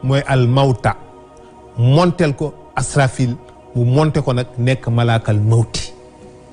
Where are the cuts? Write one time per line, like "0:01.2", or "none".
none